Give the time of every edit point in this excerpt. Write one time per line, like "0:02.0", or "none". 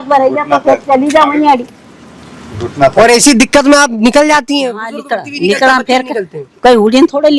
none